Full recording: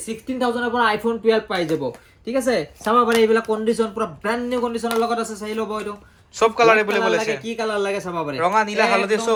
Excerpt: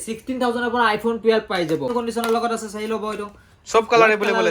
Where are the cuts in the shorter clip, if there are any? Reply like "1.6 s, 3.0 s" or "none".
1.9 s